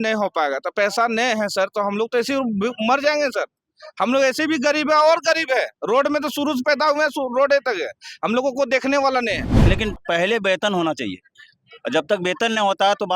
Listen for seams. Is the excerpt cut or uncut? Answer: cut